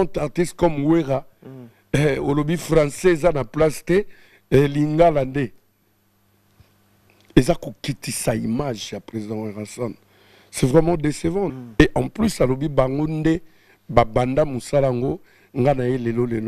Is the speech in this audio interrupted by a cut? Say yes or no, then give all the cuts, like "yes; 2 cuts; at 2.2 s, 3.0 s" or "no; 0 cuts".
yes; 1 cut; at 11.5 s